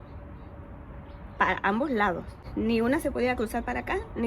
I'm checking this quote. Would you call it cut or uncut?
cut